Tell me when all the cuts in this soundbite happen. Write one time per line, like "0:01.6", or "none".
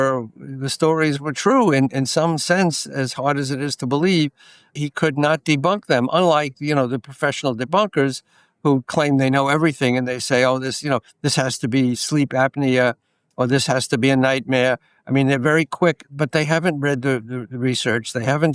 0:04.7